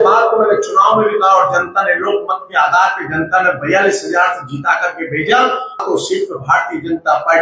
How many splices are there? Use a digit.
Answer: 1